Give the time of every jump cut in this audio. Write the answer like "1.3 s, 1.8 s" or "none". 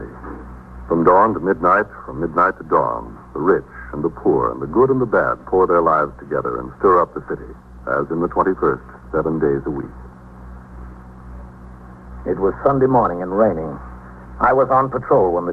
none